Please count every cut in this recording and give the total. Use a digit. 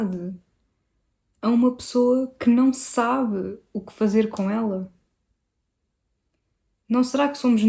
0